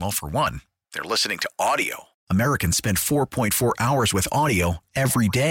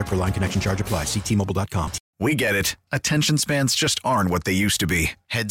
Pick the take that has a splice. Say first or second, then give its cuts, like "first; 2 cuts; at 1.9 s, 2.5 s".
second; 1 cut; at 2.0 s